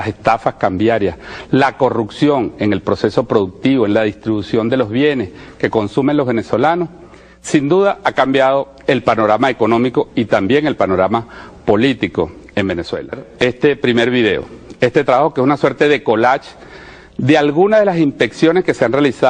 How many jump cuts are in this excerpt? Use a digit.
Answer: 1